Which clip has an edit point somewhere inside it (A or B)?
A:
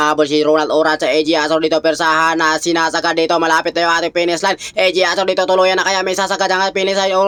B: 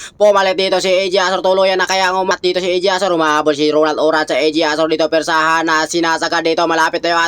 B